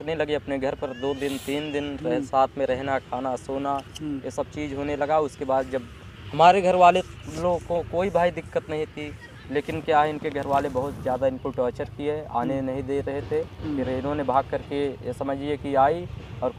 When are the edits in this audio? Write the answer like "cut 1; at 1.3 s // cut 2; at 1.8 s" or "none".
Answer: none